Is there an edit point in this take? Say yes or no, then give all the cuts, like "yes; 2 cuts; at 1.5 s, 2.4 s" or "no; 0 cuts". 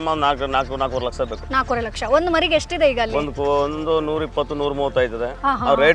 no; 0 cuts